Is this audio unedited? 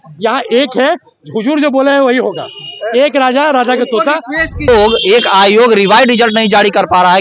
no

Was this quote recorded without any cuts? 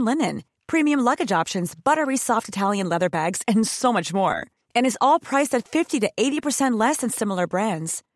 yes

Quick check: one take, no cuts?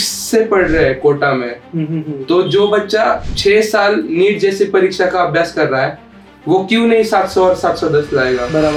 yes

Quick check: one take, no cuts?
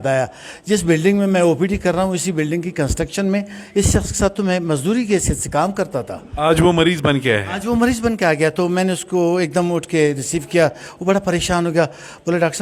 yes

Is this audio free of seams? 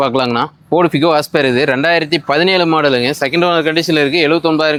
yes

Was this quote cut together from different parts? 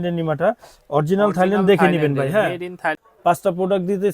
yes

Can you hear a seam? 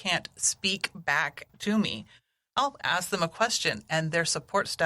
yes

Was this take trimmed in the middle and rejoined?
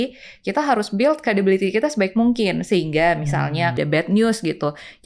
yes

